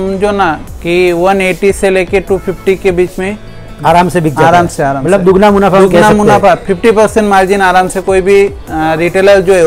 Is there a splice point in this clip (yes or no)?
no